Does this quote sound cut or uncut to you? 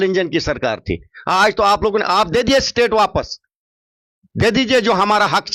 uncut